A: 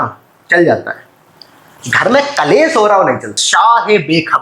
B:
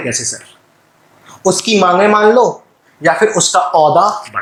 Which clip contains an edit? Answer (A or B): A